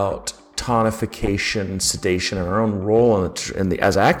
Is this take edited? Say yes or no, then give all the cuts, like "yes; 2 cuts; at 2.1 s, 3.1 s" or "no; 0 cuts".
no; 0 cuts